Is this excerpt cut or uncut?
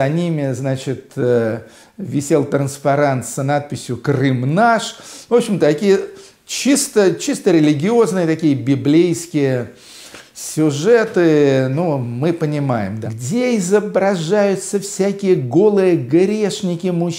cut